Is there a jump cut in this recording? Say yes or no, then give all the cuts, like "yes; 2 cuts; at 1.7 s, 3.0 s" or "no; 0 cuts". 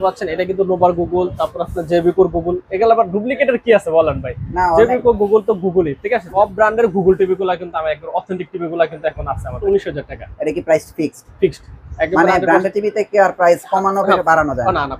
yes; 2 cuts; at 6.3 s, 9.6 s